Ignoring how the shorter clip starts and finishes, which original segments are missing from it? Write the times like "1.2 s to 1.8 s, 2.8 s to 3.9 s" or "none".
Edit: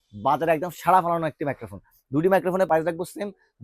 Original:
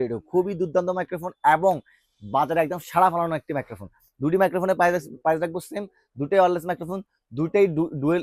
4.8 s to 5.2 s